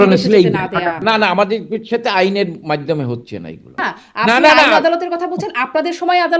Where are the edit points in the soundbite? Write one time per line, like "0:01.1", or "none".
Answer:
0:01.0
0:04.0